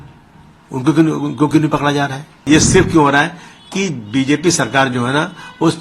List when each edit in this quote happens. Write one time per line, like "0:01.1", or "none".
0:02.5